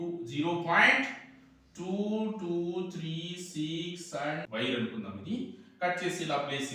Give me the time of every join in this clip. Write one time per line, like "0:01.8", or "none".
0:04.5